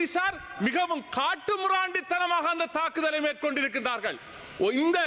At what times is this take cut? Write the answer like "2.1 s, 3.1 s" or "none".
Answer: none